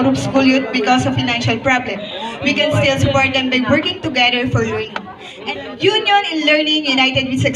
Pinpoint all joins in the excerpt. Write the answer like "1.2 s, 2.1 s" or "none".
5.4 s